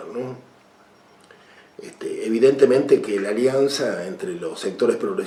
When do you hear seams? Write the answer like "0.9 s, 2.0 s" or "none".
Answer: none